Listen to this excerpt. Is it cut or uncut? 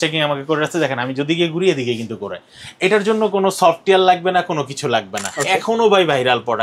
cut